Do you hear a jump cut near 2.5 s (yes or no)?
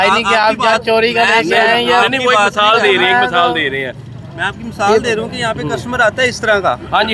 no